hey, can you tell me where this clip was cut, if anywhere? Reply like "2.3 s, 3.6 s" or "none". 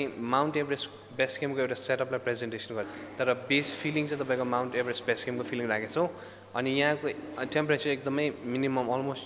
2.9 s